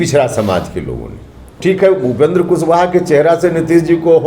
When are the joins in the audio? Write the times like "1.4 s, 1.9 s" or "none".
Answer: 1.5 s